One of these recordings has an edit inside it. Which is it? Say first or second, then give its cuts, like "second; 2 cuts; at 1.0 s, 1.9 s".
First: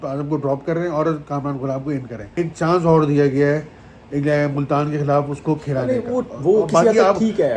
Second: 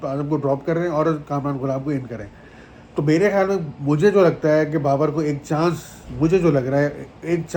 first; 1 cut; at 2.2 s